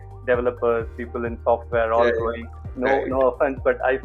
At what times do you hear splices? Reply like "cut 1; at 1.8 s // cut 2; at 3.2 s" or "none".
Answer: cut 1; at 2.6 s